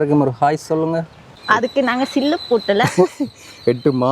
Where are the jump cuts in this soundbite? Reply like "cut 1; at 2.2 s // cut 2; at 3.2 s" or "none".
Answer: cut 1; at 1.4 s

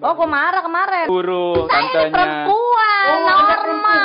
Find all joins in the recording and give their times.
cut 1; at 1.1 s

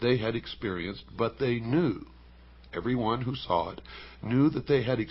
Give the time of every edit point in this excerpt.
cut 1; at 2.6 s

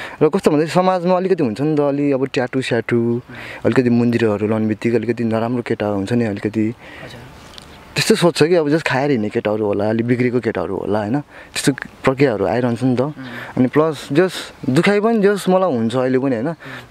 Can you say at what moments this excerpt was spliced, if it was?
none

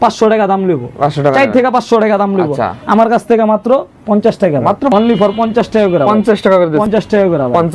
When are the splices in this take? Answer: cut 1; at 4.9 s // cut 2; at 6.9 s

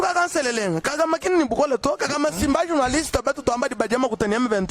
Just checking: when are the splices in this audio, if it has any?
none

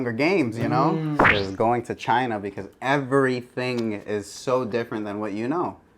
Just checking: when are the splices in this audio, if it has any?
cut 1; at 1.2 s

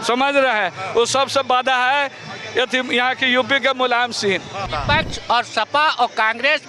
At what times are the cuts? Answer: cut 1; at 4.7 s

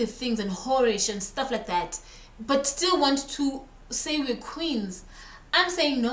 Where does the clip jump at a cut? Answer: none

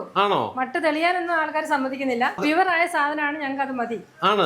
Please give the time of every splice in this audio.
cut 1; at 2.4 s

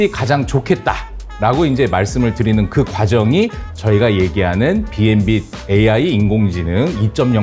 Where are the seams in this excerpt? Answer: none

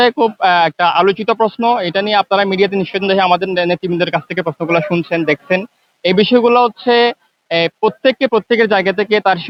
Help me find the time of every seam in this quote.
none

